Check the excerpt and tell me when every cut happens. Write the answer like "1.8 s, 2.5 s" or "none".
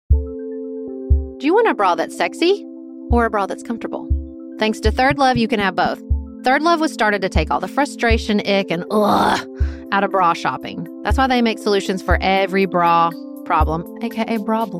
1.2 s